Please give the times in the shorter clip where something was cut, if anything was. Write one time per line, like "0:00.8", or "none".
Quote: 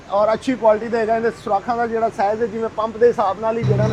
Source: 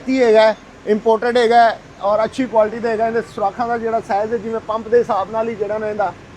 none